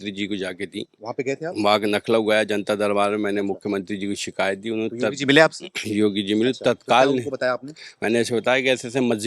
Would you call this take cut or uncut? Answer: uncut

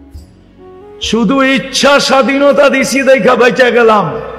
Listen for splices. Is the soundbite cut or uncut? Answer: uncut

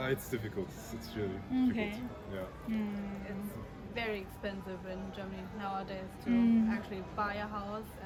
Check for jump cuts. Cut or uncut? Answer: uncut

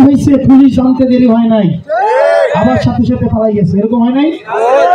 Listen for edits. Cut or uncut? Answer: uncut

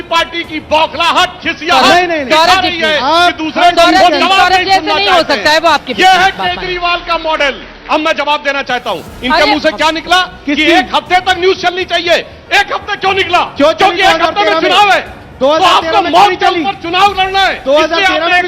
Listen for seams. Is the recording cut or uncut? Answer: cut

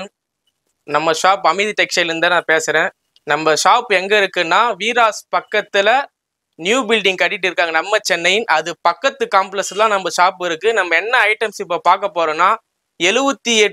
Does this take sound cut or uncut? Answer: uncut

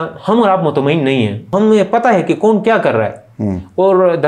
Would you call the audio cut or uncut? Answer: cut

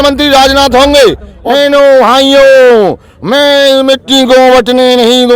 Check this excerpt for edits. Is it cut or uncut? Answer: cut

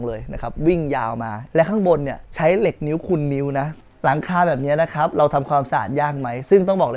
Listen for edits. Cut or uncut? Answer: cut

